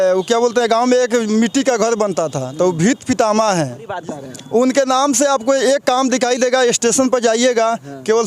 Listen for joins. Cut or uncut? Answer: cut